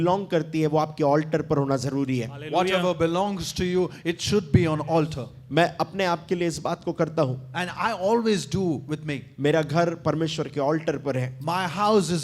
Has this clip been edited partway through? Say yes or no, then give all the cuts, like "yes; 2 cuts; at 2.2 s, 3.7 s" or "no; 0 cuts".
no; 0 cuts